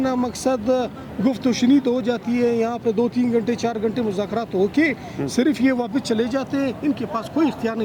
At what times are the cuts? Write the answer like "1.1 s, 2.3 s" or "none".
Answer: none